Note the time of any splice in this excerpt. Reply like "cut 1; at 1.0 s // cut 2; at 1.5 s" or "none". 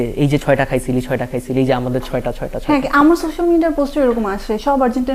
none